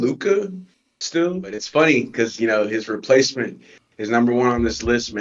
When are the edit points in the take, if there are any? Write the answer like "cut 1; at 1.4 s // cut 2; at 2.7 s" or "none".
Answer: cut 1; at 1.5 s